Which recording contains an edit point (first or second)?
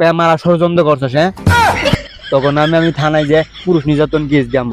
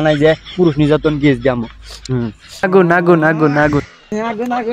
second